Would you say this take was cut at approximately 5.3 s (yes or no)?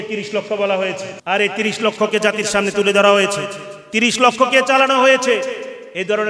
no